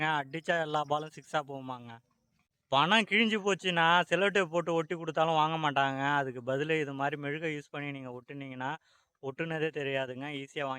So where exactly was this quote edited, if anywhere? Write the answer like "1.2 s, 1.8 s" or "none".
2.5 s